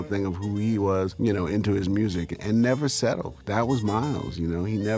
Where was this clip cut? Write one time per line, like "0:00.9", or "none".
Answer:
0:01.1
0:02.3
0:03.3